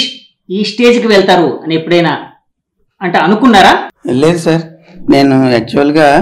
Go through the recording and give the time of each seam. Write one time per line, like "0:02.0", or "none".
0:03.9